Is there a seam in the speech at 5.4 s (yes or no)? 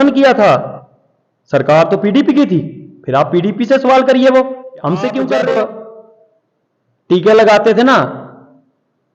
yes